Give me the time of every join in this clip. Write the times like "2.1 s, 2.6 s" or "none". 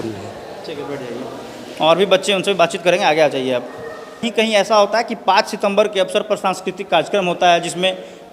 4.3 s